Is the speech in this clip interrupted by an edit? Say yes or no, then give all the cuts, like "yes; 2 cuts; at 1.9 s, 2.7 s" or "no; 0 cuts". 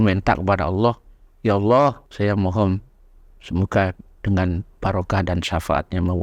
yes; 1 cut; at 2.1 s